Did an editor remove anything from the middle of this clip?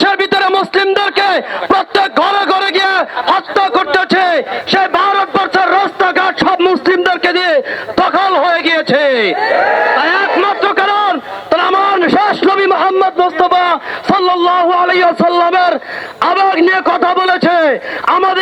no; 0 cuts

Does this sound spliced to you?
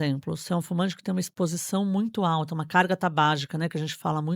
no; 0 cuts

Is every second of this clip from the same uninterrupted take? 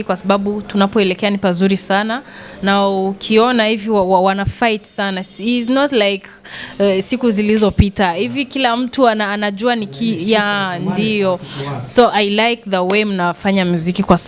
yes; 0 cuts

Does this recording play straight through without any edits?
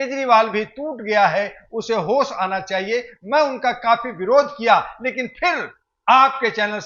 yes; 0 cuts

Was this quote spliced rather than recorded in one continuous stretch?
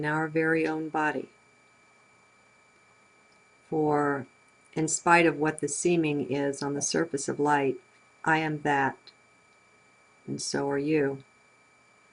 yes; 1 cut; at 2.9 s

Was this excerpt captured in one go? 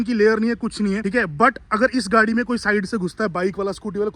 yes; 0 cuts

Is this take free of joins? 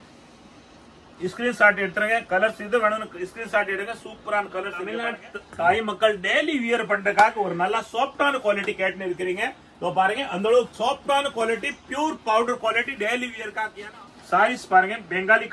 no; 2 cuts; at 4.8 s, 13.8 s

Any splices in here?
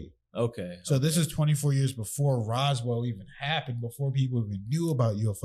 no; 0 cuts

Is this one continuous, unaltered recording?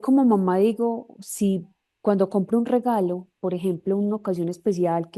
yes; 0 cuts

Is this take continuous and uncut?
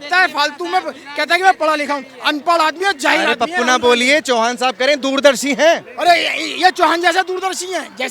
yes; 0 cuts

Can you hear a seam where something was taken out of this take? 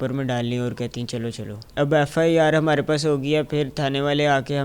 yes; 1 cut; at 1.6 s

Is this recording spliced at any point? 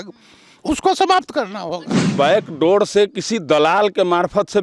yes; 1 cut; at 2.1 s

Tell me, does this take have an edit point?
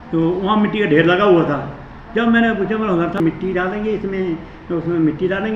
yes; 1 cut; at 3.2 s

